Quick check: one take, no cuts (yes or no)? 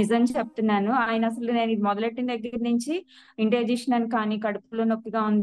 yes